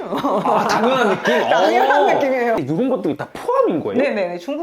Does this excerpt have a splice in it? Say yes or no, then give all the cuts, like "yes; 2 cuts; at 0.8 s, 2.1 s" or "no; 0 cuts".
yes; 1 cut; at 2.6 s